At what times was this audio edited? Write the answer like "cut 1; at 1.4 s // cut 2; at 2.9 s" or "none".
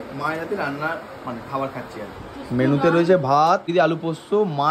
cut 1; at 3.7 s